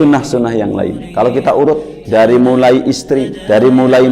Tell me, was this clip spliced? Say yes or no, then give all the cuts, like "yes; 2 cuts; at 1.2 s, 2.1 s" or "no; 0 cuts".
yes; 1 cut; at 1.0 s